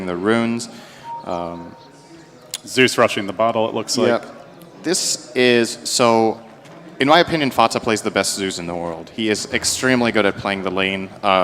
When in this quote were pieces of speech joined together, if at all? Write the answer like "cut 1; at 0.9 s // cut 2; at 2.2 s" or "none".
cut 1; at 8.9 s

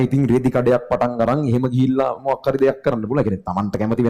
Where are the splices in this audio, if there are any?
none

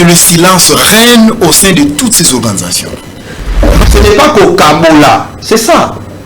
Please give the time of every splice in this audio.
cut 1; at 3.8 s

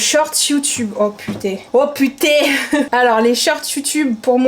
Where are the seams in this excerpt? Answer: none

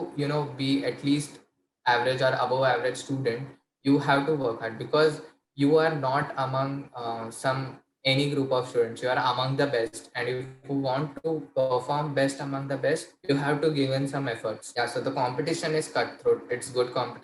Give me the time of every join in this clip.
none

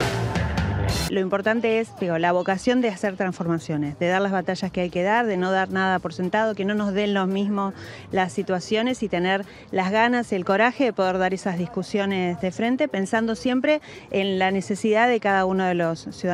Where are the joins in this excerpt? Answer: cut 1; at 1.1 s

